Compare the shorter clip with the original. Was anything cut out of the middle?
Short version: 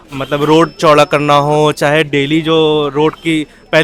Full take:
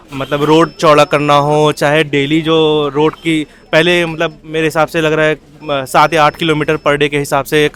no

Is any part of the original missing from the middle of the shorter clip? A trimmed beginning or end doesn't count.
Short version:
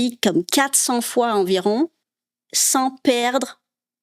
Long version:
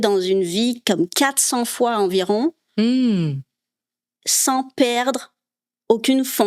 yes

